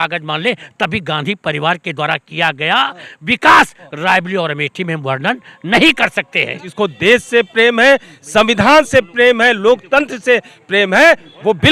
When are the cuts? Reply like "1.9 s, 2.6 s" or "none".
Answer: 6.6 s